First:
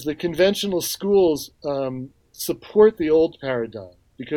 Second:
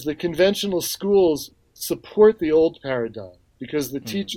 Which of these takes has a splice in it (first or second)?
second